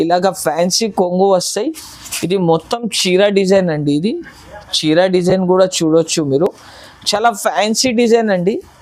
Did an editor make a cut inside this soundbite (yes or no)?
no